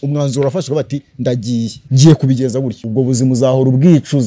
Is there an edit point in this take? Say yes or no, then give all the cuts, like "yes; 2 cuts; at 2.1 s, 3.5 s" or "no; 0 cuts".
yes; 2 cuts; at 1.8 s, 2.8 s